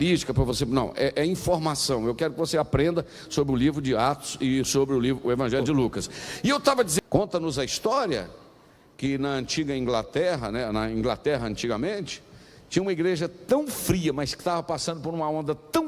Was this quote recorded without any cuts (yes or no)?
no